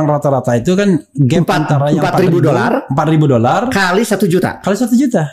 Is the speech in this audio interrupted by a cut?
no; 0 cuts

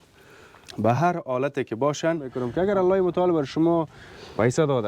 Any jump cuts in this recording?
yes; 1 cut; at 2.4 s

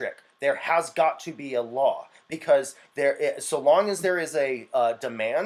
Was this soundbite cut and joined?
no; 0 cuts

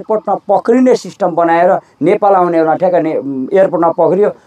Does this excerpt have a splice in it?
no; 0 cuts

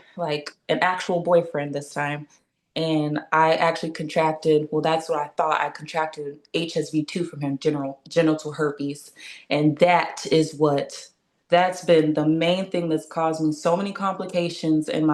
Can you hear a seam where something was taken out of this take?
no; 0 cuts

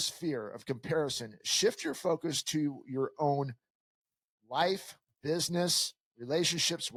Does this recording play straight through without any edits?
yes; 0 cuts

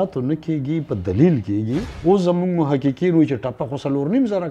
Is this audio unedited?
no; 1 cut; at 1.9 s

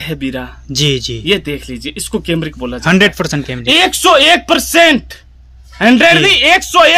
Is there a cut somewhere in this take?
no; 0 cuts

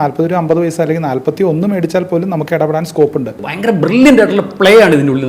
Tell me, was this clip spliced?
yes; 1 cut; at 3.3 s

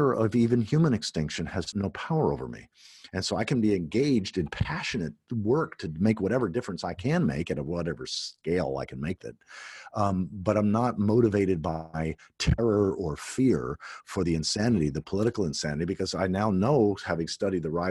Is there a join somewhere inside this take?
yes; 1 cut; at 1.7 s

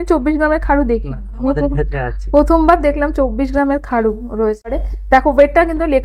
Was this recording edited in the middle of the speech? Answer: yes; 1 cut; at 4.8 s

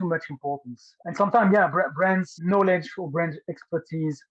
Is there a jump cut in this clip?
no; 0 cuts

